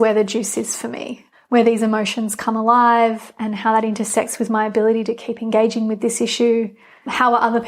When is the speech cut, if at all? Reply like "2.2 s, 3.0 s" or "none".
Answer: none